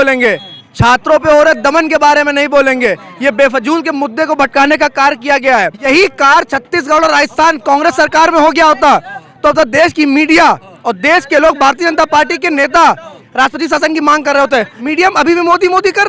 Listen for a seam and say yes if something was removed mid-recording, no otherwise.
yes